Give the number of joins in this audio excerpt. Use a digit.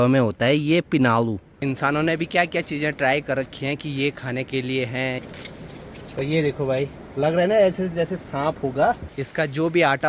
3